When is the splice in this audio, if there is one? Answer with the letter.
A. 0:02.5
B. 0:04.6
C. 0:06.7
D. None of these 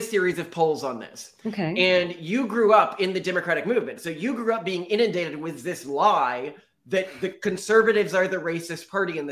D